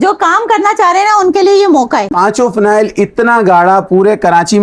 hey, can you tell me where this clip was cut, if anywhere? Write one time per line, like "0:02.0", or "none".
0:02.1